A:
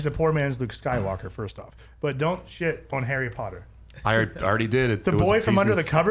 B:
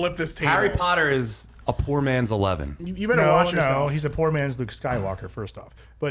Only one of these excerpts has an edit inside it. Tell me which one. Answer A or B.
B